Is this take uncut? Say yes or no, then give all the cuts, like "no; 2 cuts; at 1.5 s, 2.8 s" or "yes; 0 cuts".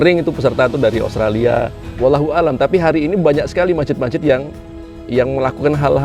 no; 1 cut; at 1.8 s